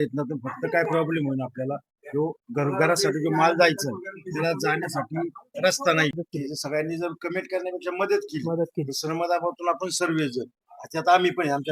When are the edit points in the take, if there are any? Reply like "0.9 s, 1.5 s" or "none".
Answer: 6.1 s